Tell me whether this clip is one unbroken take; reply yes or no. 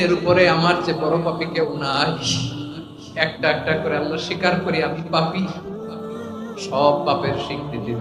yes